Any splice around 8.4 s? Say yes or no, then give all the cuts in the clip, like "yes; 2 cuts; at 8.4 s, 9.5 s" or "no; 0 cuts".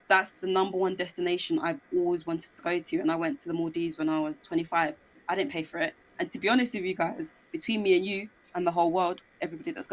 no; 0 cuts